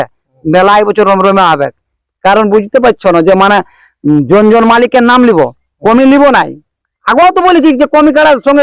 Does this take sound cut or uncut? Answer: uncut